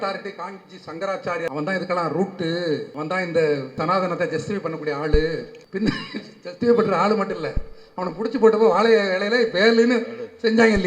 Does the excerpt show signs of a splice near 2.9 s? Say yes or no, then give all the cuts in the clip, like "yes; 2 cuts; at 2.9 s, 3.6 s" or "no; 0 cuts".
yes; 4 cuts; at 1.5 s, 2.9 s, 3.8 s, 5.6 s